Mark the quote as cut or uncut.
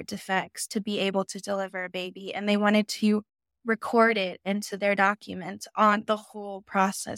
uncut